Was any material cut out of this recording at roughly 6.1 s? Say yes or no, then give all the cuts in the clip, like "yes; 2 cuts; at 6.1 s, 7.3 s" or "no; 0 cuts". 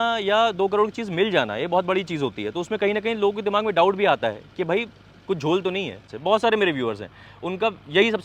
yes; 1 cut; at 6.1 s